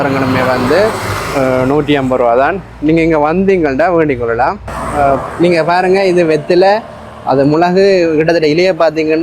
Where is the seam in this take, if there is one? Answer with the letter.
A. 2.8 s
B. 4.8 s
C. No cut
B